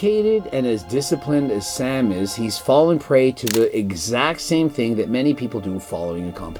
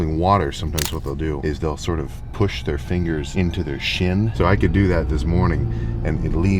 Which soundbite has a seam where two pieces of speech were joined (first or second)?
second